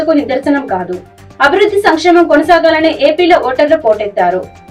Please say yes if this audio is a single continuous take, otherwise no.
yes